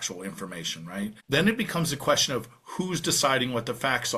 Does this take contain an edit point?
yes; 1 cut; at 1.2 s

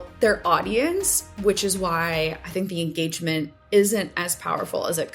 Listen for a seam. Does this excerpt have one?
no; 0 cuts

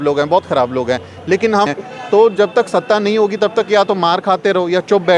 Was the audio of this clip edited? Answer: yes; 1 cut; at 1.7 s

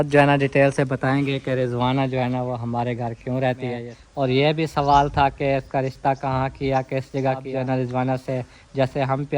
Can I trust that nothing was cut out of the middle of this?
no; 2 cuts; at 3.9 s, 7.5 s

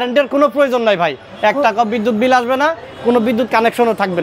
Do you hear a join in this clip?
no; 0 cuts

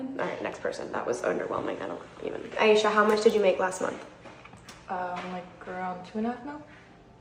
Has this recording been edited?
no; 0 cuts

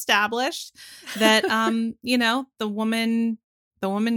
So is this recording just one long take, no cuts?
yes; 0 cuts

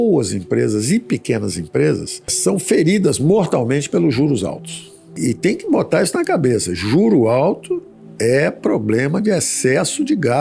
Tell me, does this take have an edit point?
no; 0 cuts

